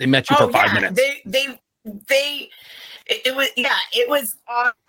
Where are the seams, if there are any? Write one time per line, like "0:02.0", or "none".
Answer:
none